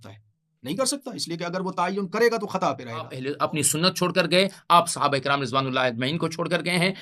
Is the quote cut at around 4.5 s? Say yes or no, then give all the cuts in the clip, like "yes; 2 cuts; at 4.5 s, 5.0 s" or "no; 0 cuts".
no; 1 cut; at 3.2 s